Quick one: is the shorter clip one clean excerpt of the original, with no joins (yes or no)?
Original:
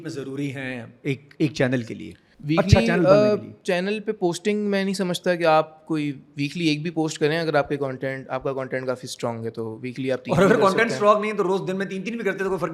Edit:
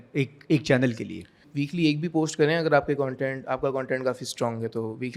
no